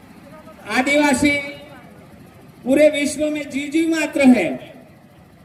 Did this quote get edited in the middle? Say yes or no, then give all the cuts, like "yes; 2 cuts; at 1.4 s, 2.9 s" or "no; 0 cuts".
no; 0 cuts